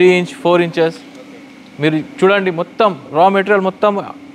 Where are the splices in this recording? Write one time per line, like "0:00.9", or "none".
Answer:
none